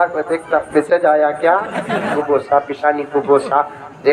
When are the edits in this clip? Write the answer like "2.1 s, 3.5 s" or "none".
2.1 s